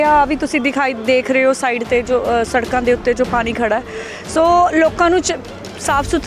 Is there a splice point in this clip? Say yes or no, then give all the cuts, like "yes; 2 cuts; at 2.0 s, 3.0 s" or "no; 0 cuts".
no; 0 cuts